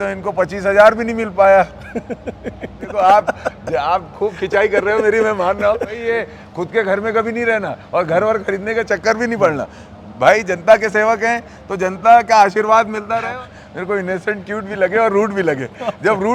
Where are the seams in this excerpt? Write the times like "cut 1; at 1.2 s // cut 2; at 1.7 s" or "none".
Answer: cut 1; at 2.9 s // cut 2; at 6.0 s // cut 3; at 13.2 s